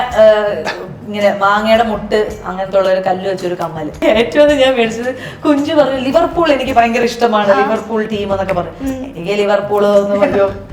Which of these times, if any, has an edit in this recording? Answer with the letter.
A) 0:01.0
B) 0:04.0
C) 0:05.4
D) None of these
B